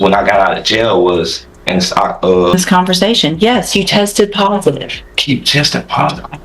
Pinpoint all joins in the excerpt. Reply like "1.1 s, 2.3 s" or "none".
2.5 s